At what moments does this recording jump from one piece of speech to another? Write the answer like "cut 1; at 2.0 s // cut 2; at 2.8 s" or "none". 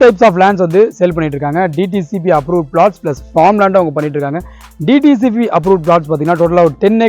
none